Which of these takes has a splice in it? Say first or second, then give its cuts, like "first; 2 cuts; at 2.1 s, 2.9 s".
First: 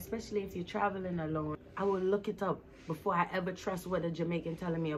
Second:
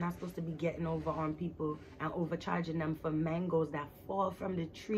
first; 1 cut; at 1.5 s